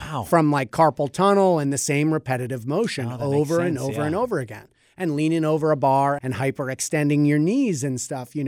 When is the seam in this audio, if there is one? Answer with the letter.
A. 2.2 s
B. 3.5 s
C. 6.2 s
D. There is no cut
C